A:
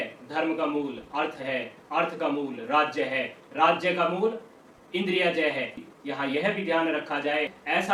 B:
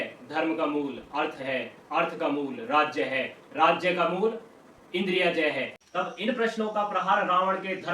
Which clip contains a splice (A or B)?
B